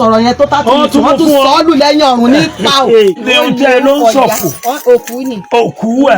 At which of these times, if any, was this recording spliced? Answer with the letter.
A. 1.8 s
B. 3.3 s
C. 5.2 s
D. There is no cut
B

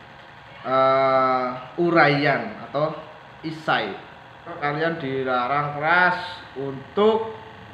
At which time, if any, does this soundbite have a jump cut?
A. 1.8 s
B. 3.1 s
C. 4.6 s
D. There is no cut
C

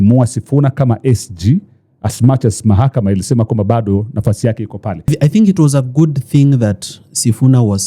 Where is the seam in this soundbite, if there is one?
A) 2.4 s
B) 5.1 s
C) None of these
B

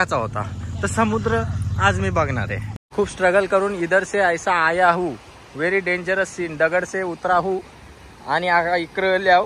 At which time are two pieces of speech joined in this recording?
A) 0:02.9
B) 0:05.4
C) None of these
A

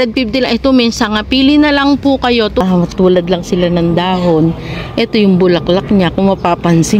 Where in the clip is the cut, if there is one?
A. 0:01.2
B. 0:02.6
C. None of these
B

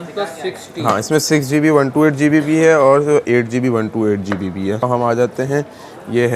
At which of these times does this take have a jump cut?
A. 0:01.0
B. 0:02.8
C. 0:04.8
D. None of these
C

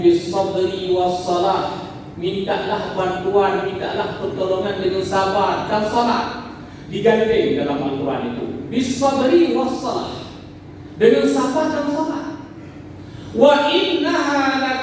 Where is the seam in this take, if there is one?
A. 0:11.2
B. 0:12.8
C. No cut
C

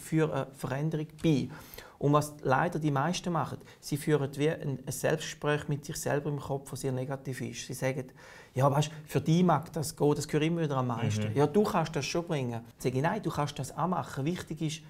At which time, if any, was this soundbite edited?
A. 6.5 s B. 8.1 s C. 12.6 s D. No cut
C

